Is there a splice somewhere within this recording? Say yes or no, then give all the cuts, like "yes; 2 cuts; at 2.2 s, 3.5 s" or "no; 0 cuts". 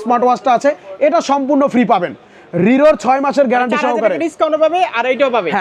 no; 0 cuts